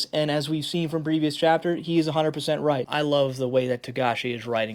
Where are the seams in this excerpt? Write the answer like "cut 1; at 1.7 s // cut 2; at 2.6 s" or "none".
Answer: cut 1; at 2.9 s